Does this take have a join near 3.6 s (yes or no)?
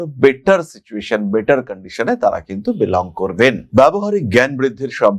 no